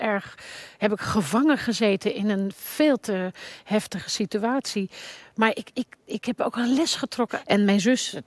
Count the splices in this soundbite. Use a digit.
1